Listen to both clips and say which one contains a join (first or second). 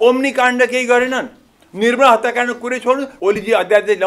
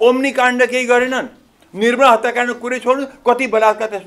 first